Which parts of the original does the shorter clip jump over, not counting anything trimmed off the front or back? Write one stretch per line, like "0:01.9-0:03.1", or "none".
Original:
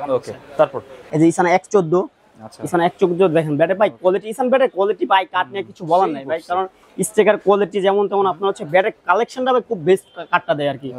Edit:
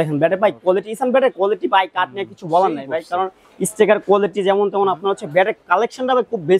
none